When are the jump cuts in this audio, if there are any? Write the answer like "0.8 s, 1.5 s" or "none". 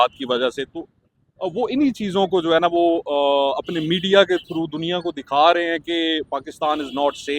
none